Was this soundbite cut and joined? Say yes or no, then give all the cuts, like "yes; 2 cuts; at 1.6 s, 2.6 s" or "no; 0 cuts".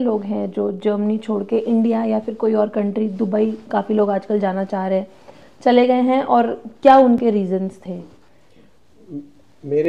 no; 0 cuts